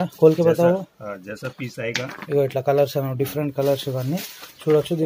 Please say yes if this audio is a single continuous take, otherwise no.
yes